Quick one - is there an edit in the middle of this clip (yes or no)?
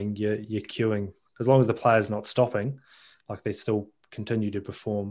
yes